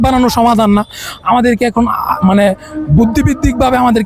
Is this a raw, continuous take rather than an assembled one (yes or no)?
yes